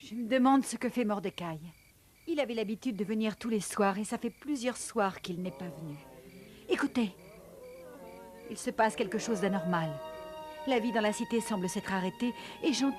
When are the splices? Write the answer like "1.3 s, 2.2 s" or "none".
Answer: none